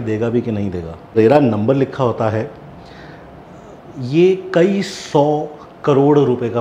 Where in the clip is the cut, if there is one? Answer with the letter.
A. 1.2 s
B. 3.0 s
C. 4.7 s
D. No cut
A